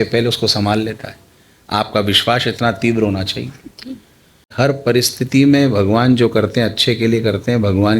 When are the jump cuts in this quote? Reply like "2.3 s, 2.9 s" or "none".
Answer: 4.5 s

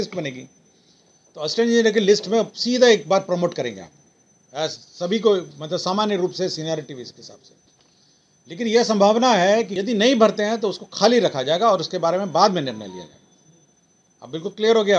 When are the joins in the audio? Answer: 9.7 s

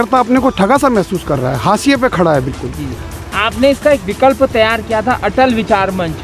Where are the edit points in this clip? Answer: none

